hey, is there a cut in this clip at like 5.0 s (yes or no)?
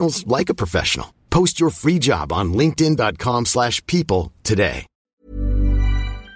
yes